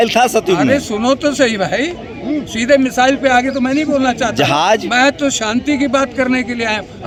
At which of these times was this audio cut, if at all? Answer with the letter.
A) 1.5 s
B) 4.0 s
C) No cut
C